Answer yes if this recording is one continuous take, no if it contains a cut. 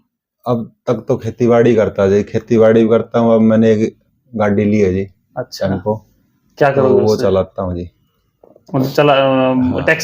yes